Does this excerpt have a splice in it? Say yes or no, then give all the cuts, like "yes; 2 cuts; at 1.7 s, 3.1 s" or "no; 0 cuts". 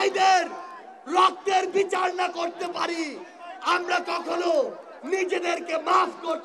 no; 0 cuts